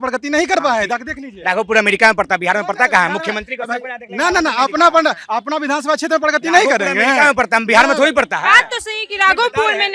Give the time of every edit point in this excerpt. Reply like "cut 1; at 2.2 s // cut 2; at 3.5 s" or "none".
none